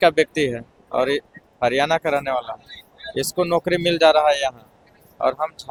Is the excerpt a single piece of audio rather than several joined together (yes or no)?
yes